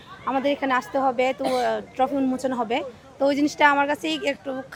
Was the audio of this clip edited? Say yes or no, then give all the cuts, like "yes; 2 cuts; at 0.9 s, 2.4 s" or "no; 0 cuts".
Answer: no; 0 cuts